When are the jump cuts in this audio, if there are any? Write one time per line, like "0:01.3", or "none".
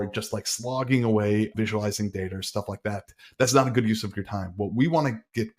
0:01.5